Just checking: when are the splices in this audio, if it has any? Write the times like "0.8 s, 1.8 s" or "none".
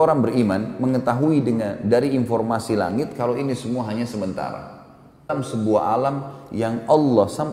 5.3 s